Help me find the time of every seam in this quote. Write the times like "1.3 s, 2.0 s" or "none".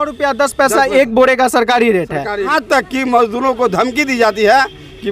2.5 s